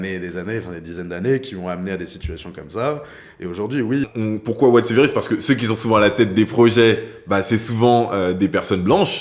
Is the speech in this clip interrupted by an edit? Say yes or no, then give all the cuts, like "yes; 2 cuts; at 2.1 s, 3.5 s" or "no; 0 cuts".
yes; 1 cut; at 4.1 s